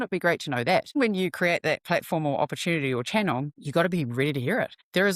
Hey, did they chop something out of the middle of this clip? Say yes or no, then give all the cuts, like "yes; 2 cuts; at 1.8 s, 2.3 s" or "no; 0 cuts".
yes; 1 cut; at 1.0 s